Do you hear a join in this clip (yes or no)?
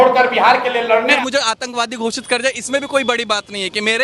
yes